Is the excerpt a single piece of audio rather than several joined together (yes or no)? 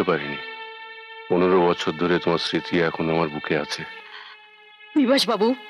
yes